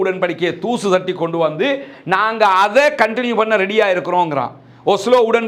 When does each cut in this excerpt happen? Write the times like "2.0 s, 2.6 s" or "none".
none